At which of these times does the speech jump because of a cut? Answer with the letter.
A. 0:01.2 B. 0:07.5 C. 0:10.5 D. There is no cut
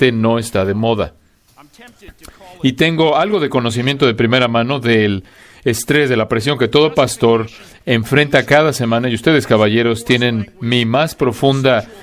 C